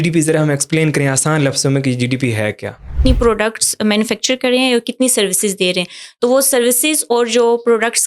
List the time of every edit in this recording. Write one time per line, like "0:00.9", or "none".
0:02.9